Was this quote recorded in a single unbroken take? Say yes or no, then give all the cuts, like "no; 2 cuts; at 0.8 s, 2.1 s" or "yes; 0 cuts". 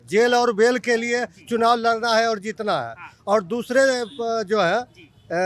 yes; 0 cuts